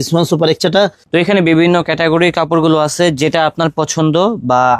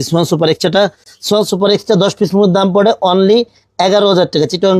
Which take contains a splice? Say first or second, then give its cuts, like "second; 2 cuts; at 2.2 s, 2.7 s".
first; 1 cut; at 1.0 s